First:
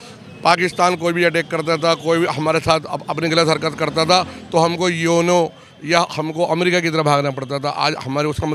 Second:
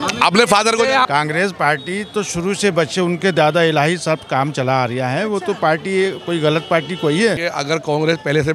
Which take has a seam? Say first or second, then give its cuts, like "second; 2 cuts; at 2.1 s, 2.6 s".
second; 2 cuts; at 1.1 s, 7.5 s